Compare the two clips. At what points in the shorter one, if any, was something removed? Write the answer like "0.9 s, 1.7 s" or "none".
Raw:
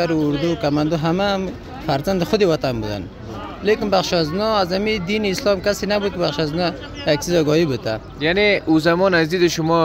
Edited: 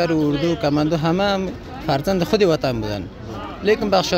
none